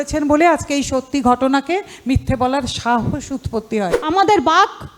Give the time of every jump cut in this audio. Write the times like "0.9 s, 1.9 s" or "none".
4.0 s